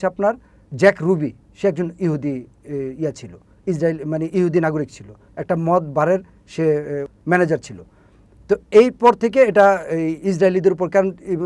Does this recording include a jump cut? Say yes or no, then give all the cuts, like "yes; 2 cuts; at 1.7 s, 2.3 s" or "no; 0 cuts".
no; 0 cuts